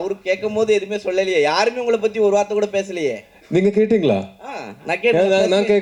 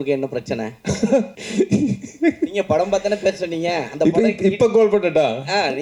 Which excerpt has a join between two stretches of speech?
second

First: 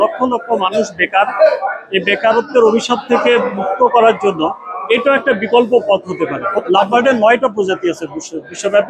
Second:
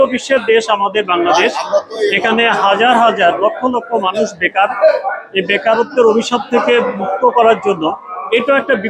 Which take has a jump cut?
first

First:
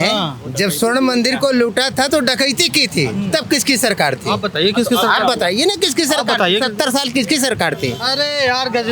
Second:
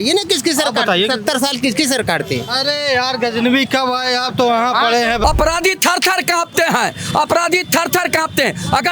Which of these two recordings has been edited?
second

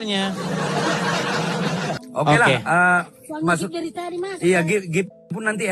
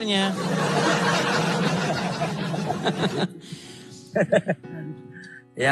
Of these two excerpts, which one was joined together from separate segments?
first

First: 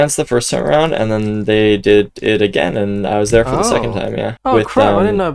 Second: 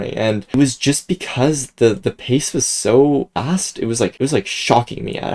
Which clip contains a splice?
first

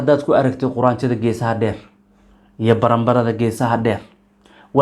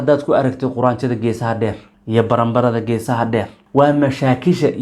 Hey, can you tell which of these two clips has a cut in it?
second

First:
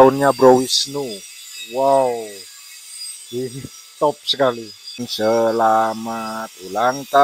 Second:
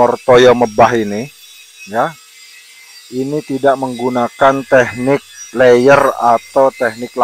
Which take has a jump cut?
first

